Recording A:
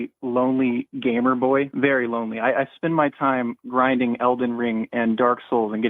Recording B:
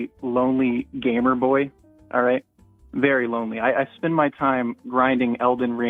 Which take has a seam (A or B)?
A